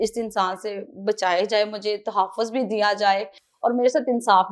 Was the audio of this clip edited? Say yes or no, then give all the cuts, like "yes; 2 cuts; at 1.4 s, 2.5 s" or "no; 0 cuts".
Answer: no; 0 cuts